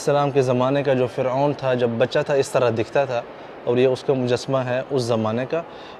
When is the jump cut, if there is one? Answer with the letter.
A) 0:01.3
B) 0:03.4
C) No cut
C